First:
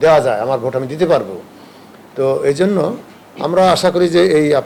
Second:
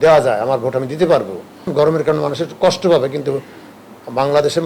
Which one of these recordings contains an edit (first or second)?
second